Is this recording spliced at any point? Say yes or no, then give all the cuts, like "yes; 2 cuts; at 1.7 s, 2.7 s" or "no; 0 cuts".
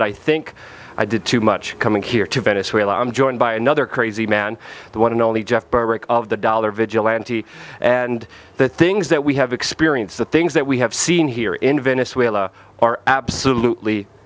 yes; 1 cut; at 7.5 s